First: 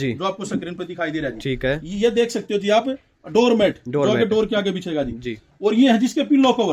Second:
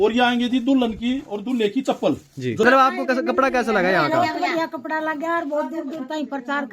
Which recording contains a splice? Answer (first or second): second